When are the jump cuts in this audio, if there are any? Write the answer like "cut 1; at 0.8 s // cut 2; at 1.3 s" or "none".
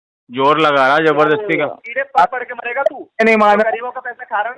cut 1; at 1.8 s

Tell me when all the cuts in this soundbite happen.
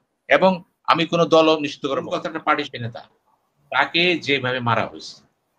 cut 1; at 2.0 s

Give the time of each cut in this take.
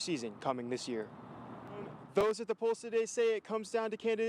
cut 1; at 2.0 s

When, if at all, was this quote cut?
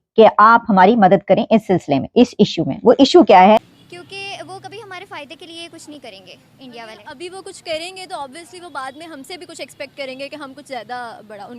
cut 1; at 3.6 s

